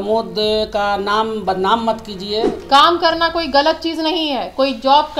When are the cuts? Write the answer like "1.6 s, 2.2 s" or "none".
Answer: 2.6 s